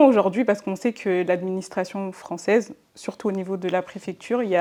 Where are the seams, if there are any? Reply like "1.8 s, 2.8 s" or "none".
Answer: none